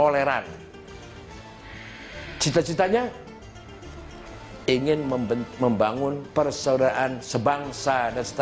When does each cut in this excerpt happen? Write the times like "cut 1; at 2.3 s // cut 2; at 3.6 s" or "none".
cut 1; at 6.2 s

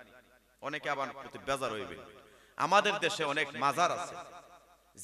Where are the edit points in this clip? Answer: none

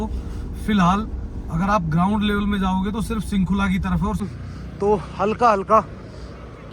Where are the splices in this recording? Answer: cut 1; at 4.2 s

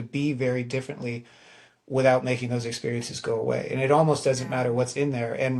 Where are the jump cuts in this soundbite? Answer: none

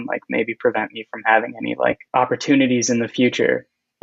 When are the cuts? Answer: cut 1; at 2.0 s

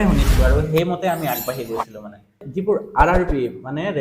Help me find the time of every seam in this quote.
cut 1; at 2.4 s

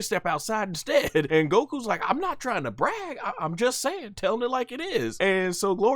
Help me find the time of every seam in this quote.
cut 1; at 1.3 s // cut 2; at 5.1 s

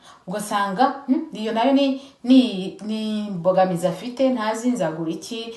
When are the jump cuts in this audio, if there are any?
none

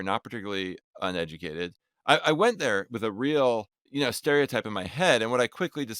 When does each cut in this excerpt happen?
cut 1; at 3.8 s

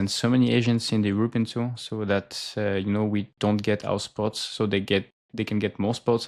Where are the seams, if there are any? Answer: none

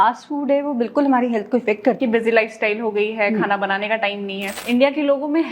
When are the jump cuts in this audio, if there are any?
cut 1; at 2.0 s // cut 2; at 4.5 s

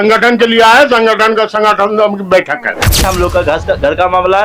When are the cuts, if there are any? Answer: cut 1; at 3.0 s

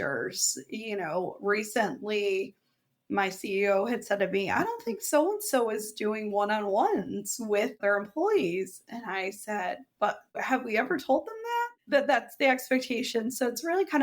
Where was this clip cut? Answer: cut 1; at 7.8 s // cut 2; at 11.7 s

